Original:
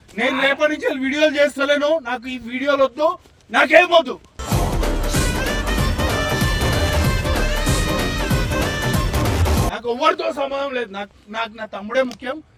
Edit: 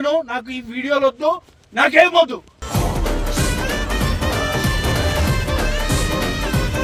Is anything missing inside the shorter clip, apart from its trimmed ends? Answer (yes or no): no